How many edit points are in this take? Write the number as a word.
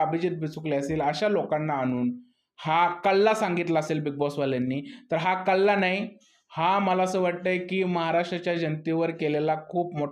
zero